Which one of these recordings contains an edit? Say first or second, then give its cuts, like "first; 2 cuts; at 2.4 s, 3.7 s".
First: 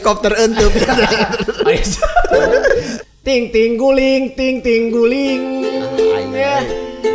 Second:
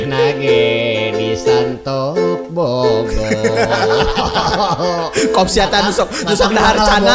first; 1 cut; at 2.9 s